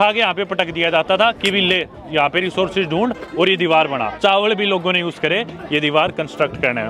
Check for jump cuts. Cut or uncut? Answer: cut